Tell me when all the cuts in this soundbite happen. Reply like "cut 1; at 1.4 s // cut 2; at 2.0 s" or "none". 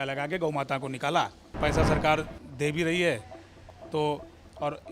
cut 1; at 1.6 s